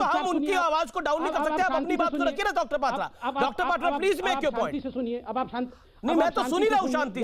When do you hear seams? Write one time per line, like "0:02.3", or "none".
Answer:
none